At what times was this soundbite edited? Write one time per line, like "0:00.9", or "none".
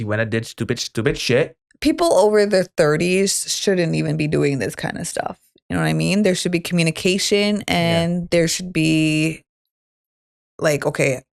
0:01.6